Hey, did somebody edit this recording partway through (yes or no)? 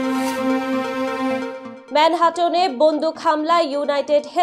no